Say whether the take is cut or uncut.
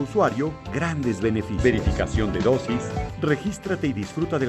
cut